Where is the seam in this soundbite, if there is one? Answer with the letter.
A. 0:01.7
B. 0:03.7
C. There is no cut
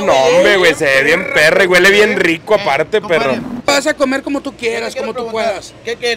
B